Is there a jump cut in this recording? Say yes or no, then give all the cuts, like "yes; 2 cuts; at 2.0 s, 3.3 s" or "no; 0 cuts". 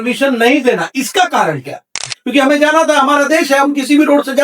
yes; 1 cut; at 2.1 s